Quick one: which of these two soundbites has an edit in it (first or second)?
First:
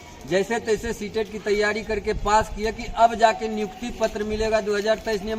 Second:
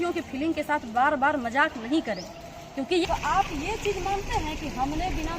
second